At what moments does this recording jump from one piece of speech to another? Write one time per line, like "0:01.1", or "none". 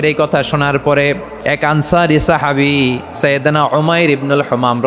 0:01.3